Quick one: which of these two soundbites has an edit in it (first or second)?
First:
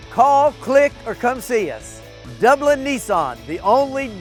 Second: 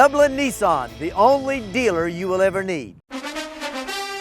second